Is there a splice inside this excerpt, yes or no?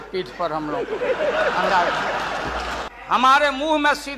yes